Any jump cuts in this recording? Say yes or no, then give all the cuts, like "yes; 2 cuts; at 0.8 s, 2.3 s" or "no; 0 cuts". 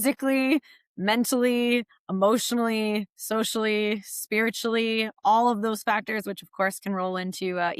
no; 0 cuts